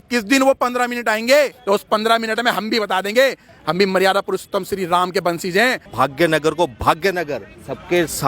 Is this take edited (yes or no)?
yes